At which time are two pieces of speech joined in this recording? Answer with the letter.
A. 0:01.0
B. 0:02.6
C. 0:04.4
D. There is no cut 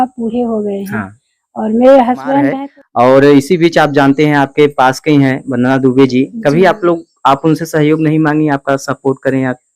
B